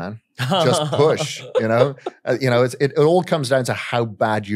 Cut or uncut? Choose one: uncut